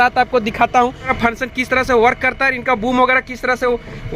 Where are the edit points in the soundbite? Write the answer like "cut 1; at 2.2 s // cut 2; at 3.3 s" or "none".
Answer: cut 1; at 1.1 s